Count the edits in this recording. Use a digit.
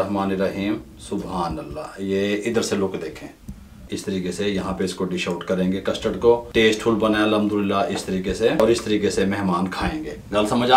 3